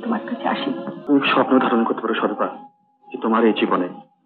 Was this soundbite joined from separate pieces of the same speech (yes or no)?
yes